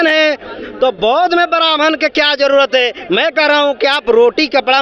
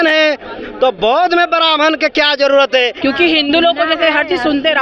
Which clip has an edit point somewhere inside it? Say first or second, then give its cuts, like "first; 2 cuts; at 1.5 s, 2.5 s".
second; 1 cut; at 3.0 s